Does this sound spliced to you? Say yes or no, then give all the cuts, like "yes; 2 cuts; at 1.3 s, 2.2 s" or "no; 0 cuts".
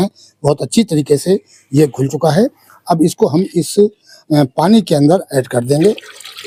no; 0 cuts